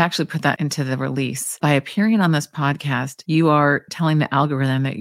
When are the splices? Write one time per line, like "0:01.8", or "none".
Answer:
none